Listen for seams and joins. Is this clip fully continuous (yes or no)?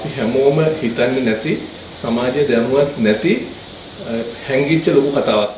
yes